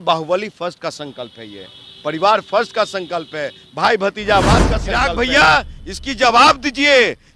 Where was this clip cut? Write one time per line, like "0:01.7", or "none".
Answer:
0:04.9